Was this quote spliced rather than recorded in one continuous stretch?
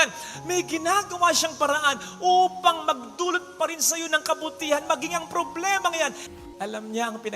yes; 1 cut; at 6.2 s

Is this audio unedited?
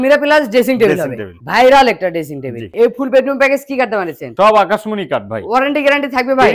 no; 1 cut; at 2.7 s

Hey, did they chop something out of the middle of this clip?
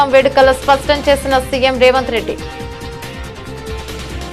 yes; 1 cut; at 2.4 s

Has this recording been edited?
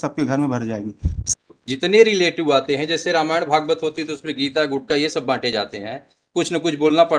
yes; 1 cut; at 1.1 s

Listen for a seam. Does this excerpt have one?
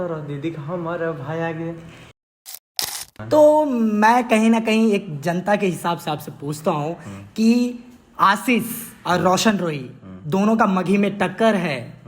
yes; 1 cut; at 2.6 s

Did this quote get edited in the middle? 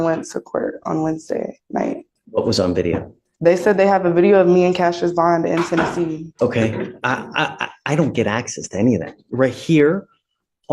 yes; 2 cuts; at 2.1 s, 6.3 s

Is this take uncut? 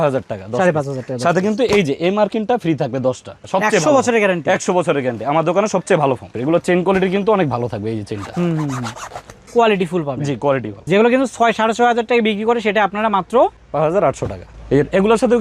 no; 3 cuts; at 3.4 s, 6.3 s, 10.7 s

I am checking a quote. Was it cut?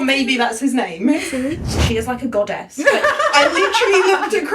yes; 1 cut; at 1.7 s

